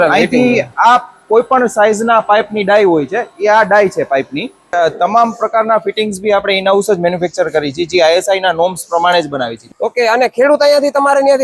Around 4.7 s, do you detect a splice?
yes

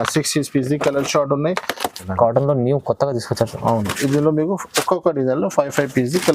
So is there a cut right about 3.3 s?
no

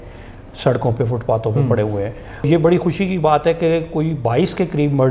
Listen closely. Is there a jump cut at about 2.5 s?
yes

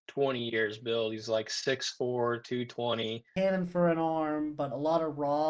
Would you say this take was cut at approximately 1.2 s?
no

